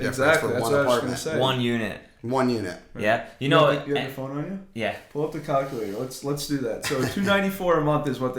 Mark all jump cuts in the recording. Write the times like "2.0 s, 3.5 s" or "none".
none